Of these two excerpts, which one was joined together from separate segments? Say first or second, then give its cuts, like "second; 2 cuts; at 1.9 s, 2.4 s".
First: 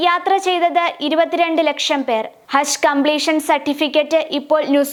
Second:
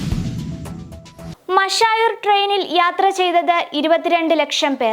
second; 1 cut; at 1.3 s